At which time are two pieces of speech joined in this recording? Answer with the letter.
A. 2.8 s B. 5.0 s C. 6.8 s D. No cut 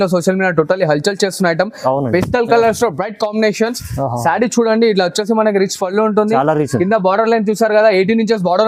D